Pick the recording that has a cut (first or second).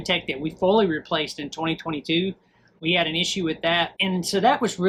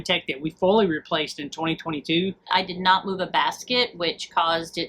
second